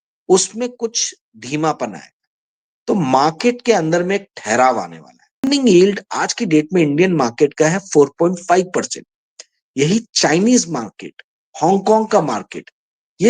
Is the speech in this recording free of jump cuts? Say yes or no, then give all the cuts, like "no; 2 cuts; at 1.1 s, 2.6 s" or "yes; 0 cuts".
no; 1 cut; at 5.5 s